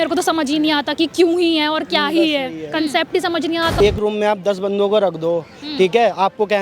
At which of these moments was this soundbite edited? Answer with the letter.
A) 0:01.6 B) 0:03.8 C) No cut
B